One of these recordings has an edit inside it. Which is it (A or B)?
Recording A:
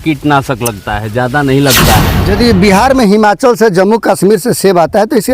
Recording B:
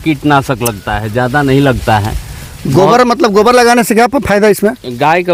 A